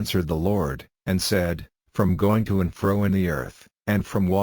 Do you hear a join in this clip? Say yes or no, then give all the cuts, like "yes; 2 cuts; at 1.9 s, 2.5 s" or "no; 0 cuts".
yes; 1 cut; at 1.7 s